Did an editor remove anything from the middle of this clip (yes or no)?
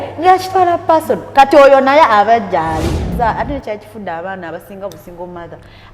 yes